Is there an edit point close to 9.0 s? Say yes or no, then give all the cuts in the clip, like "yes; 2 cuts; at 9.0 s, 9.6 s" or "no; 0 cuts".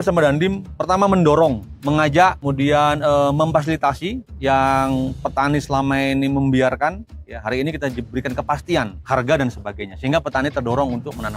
yes; 4 cuts; at 1.7 s, 2.4 s, 4.3 s, 9.0 s